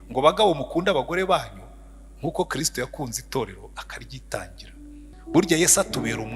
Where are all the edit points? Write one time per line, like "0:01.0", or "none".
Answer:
0:05.1